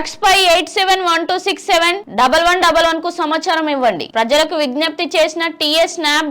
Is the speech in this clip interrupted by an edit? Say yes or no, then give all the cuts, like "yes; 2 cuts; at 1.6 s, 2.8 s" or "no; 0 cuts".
no; 0 cuts